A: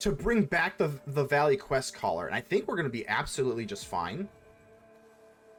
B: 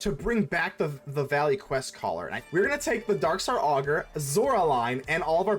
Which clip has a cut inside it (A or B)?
B